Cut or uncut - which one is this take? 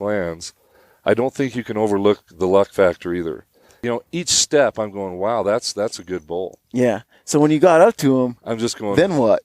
cut